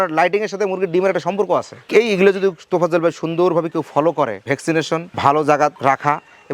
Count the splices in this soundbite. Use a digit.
1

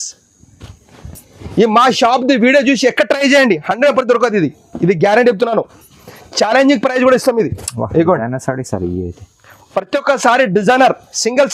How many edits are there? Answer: 0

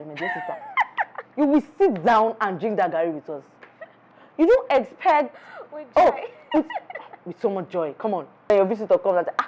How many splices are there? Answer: 1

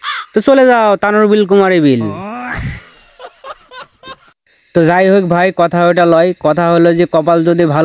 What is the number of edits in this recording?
0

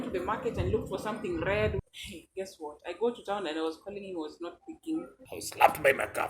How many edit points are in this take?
2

